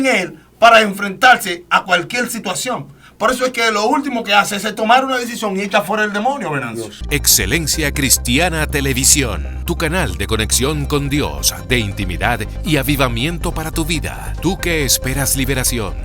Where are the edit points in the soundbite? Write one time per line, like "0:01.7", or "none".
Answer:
0:06.9